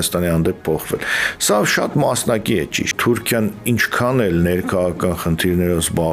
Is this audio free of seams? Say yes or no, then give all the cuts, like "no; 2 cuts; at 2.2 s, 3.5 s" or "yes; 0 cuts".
no; 1 cut; at 3.0 s